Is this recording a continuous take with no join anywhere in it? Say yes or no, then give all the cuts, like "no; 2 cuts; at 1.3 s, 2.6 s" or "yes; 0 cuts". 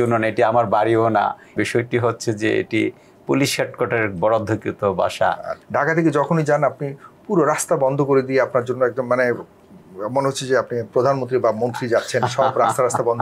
no; 2 cuts; at 1.6 s, 5.6 s